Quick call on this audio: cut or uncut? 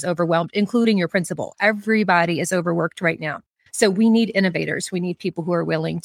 uncut